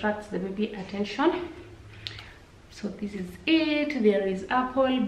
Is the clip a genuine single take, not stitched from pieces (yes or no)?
yes